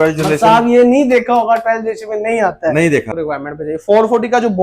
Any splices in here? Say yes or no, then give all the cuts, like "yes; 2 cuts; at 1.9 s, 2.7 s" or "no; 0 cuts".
yes; 1 cut; at 3.1 s